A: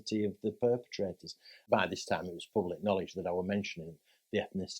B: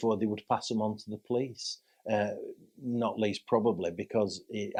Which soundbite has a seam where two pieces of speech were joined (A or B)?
A